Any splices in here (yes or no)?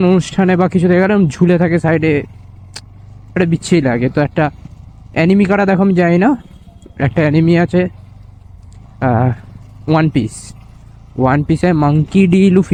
no